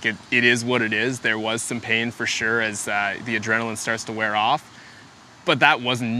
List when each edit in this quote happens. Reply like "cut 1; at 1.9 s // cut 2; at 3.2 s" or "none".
none